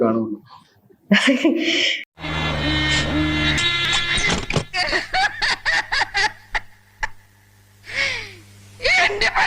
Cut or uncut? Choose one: cut